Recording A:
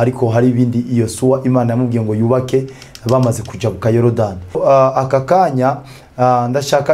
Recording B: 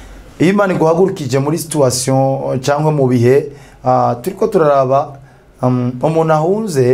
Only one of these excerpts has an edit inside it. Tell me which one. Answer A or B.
A